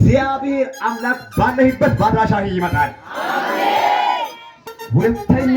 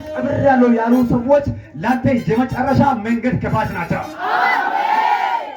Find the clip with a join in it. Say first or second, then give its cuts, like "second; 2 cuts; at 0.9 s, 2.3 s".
first; 1 cut; at 4.5 s